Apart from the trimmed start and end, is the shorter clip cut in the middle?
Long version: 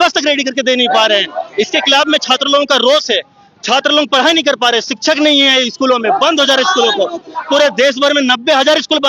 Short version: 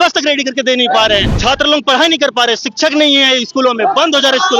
yes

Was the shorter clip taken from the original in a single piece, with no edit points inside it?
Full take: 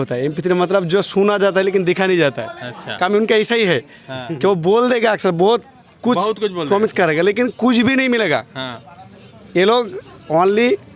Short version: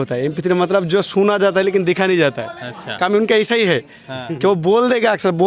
yes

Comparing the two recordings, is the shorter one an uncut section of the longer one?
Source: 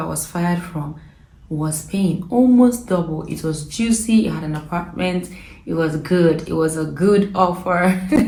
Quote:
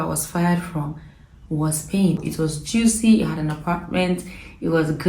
no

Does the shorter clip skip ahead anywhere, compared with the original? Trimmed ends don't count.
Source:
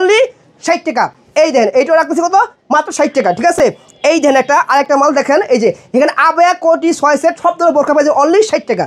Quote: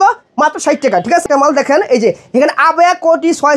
yes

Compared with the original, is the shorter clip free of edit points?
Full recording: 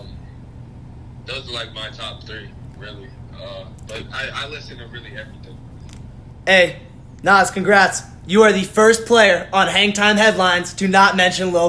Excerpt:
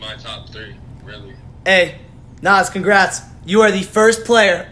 no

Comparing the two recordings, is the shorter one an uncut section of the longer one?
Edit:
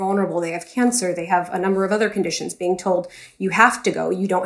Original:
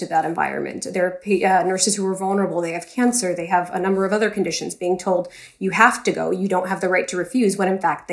yes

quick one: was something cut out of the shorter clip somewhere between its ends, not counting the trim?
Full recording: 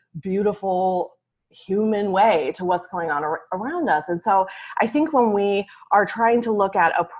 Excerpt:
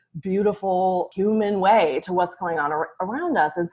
yes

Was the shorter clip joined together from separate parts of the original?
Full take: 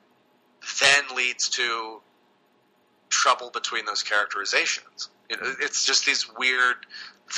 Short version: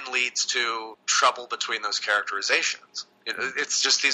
yes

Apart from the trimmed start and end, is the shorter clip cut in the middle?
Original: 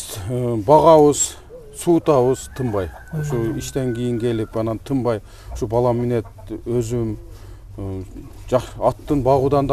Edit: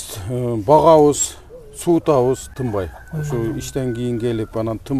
no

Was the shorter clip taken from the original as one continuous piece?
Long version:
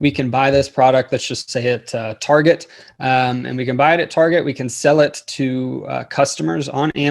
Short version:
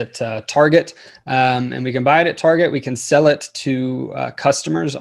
yes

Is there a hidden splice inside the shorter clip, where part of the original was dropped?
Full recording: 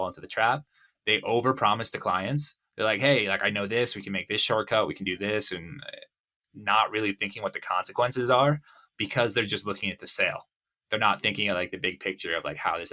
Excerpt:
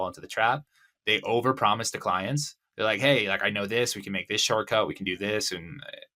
no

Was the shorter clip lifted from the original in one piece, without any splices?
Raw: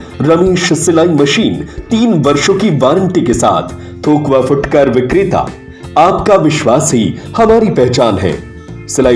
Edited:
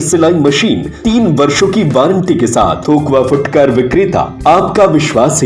no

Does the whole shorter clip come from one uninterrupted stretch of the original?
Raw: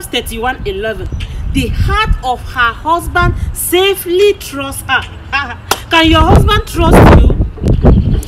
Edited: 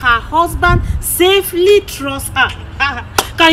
yes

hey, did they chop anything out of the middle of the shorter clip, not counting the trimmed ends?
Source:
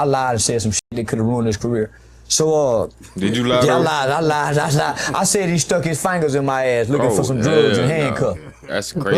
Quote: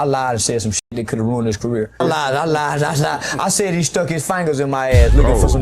yes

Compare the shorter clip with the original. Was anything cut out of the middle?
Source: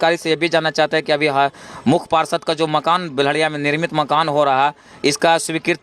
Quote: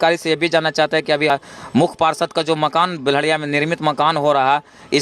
yes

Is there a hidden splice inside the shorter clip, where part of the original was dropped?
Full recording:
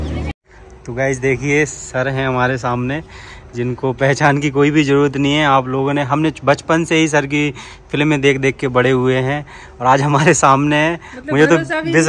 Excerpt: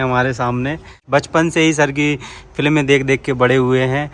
yes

